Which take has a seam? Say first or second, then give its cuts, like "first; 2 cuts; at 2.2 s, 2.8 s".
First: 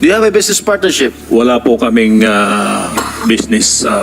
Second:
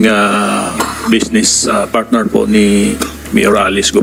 first; 1 cut; at 1.2 s